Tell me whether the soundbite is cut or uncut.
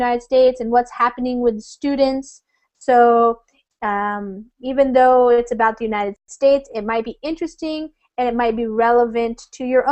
uncut